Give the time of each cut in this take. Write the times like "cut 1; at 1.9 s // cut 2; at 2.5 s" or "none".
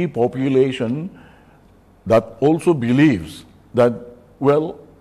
none